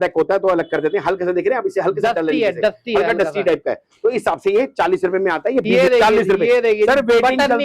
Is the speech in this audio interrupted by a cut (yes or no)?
yes